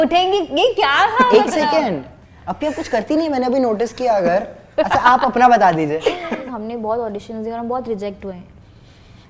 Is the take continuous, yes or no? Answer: no